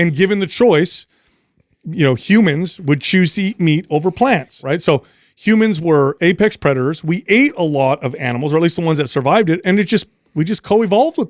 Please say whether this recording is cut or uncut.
cut